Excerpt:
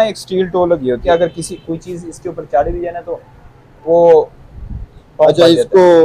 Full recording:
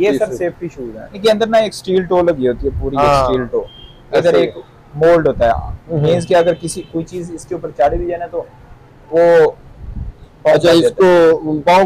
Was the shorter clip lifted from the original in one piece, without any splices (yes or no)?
no